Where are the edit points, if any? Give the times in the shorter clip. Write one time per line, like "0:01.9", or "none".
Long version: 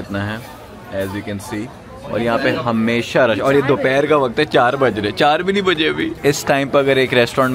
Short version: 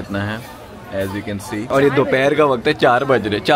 0:01.7